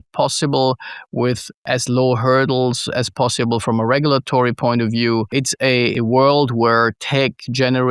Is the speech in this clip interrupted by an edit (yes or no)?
yes